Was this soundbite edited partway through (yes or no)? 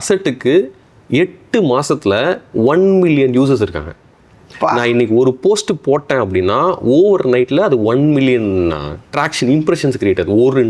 no